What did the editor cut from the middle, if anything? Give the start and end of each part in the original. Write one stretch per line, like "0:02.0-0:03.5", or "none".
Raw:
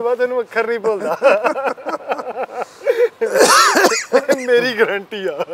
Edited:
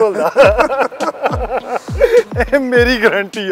0:03.2-0:04.1